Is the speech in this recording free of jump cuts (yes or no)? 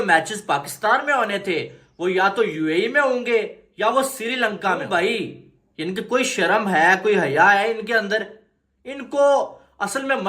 no